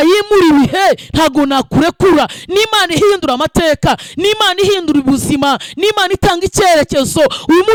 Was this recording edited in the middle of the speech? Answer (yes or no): no